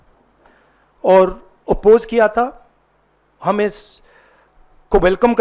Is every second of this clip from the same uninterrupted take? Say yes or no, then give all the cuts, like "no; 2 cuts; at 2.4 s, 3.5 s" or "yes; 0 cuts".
yes; 0 cuts